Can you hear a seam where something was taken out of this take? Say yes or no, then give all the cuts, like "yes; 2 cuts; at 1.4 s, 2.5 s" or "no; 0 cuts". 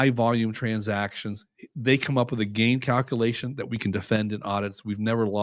no; 0 cuts